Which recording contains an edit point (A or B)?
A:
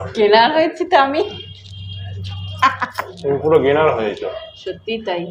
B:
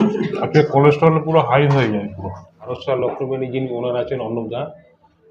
B